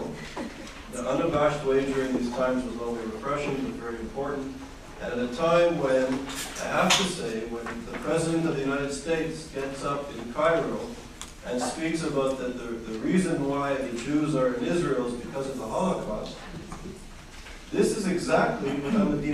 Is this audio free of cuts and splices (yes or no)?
yes